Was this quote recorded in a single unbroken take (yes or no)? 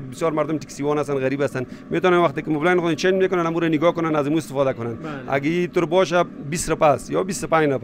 yes